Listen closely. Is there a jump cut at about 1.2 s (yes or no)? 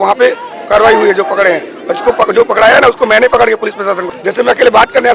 no